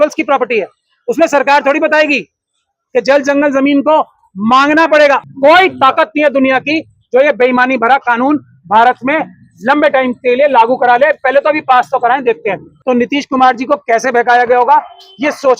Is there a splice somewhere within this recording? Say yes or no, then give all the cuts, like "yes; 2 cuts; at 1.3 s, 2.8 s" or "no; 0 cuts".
yes; 2 cuts; at 5.2 s, 12.7 s